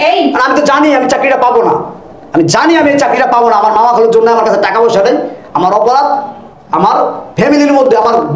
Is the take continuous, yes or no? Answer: yes